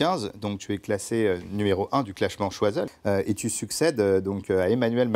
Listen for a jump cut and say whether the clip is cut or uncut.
cut